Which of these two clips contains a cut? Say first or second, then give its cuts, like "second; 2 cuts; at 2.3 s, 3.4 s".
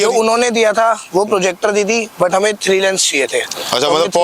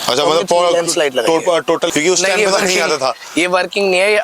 second; 1 cut; at 1.9 s